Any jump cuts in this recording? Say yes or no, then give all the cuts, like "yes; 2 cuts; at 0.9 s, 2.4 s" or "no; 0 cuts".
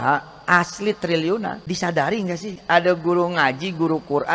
yes; 2 cuts; at 1.6 s, 2.5 s